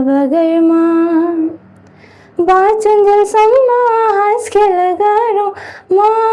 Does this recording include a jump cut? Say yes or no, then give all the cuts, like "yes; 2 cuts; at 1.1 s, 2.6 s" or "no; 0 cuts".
no; 0 cuts